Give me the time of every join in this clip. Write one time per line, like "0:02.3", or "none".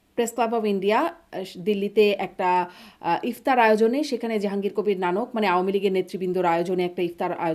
none